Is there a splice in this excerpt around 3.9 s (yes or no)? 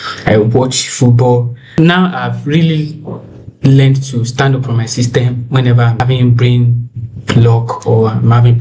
no